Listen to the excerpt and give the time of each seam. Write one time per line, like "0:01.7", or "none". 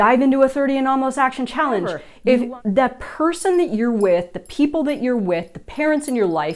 0:02.0